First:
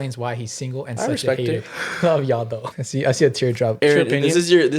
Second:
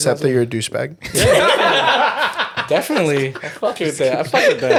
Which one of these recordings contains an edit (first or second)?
first